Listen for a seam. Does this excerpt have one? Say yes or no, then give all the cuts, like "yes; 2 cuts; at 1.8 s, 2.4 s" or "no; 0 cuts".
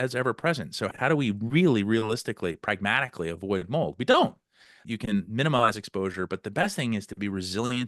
yes; 2 cuts; at 0.9 s, 4.9 s